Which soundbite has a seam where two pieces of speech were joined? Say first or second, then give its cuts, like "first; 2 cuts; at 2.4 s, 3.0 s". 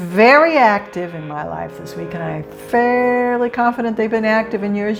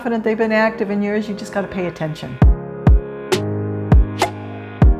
second; 1 cut; at 2.2 s